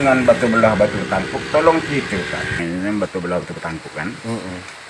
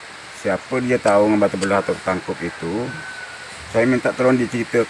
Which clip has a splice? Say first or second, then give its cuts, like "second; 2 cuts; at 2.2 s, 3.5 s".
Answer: first; 1 cut; at 2.6 s